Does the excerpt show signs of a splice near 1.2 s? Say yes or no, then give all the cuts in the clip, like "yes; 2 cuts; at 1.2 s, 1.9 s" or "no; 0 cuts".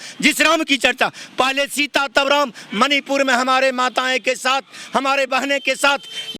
no; 0 cuts